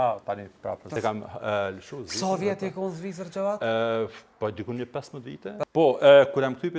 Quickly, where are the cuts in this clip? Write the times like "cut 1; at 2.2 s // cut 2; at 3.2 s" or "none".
cut 1; at 0.9 s // cut 2; at 5.6 s